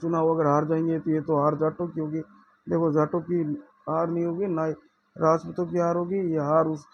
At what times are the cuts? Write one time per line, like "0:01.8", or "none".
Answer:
none